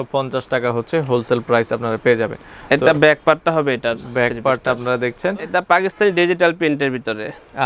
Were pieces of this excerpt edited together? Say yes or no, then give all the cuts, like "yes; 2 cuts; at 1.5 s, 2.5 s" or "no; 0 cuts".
yes; 1 cut; at 5.5 s